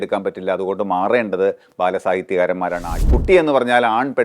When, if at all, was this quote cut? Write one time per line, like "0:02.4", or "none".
0:02.9